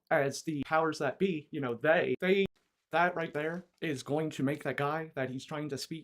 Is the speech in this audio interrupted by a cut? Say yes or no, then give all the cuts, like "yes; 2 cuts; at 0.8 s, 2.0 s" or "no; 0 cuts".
yes; 1 cut; at 2.5 s